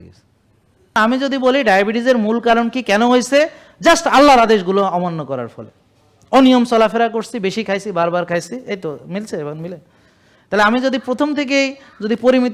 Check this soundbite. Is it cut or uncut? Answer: uncut